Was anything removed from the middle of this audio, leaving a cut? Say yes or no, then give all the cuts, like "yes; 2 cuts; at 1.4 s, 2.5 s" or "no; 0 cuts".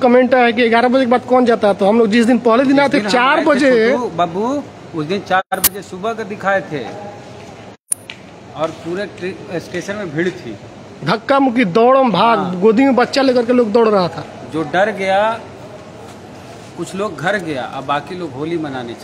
no; 0 cuts